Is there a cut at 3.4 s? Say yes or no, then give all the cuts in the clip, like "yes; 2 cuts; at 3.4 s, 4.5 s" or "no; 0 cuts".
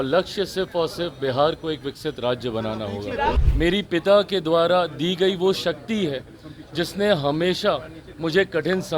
yes; 1 cut; at 3.4 s